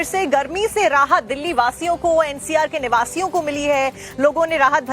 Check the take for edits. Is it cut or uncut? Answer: cut